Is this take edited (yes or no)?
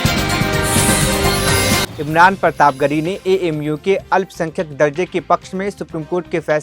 yes